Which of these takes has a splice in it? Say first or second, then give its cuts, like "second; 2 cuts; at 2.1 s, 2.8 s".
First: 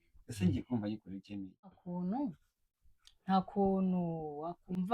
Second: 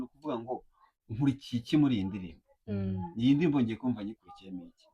first; 1 cut; at 1.8 s